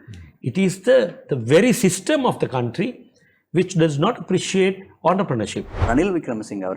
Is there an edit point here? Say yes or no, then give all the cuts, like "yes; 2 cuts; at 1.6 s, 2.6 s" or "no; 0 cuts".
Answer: yes; 1 cut; at 5.8 s